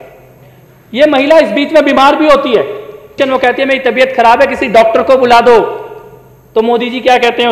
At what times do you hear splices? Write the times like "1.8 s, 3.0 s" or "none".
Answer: 3.0 s